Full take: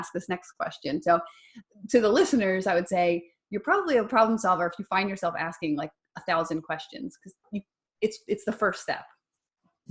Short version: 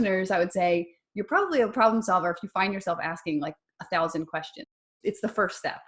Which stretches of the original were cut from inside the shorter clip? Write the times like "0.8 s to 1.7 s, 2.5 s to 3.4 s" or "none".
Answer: 7.3 s to 8.2 s